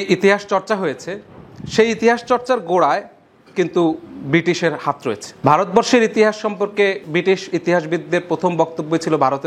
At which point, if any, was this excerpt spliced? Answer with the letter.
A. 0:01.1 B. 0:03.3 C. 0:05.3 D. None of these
C